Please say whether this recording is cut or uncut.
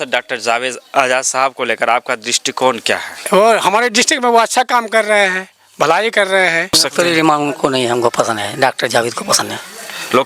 cut